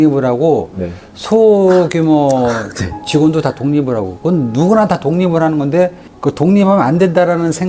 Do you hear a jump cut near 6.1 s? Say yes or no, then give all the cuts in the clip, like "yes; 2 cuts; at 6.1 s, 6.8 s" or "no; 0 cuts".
yes; 1 cut; at 6.1 s